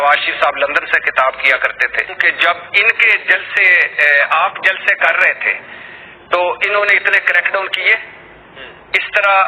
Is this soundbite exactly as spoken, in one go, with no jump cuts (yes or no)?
no